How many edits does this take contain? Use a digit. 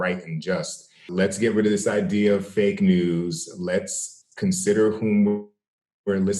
1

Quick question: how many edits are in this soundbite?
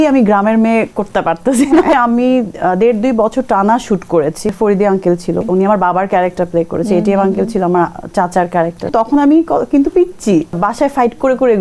5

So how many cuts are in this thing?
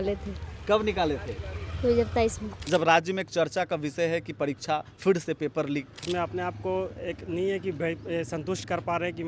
2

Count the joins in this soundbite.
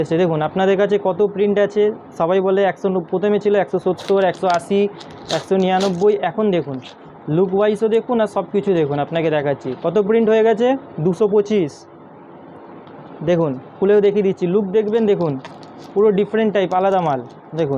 0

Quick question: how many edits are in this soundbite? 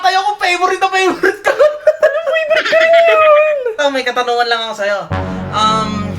1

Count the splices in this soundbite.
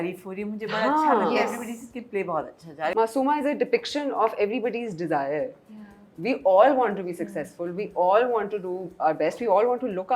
1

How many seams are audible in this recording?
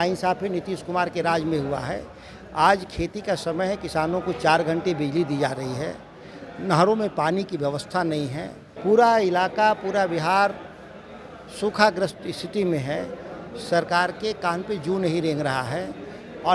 1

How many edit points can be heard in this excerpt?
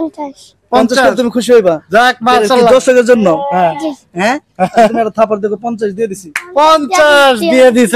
0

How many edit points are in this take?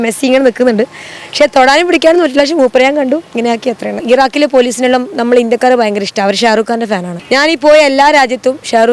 2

